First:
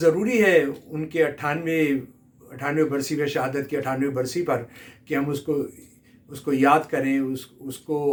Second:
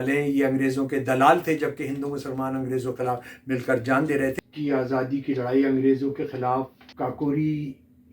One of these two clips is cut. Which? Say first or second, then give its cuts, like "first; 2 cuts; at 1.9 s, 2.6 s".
second; 2 cuts; at 4.3 s, 6.8 s